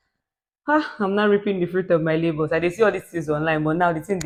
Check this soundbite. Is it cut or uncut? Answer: uncut